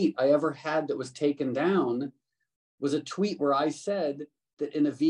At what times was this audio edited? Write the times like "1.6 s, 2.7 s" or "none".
none